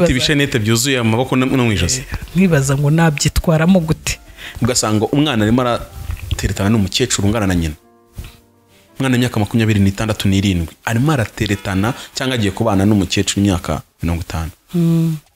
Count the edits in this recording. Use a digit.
1